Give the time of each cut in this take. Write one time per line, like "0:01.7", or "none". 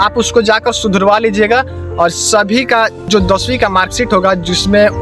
0:03.1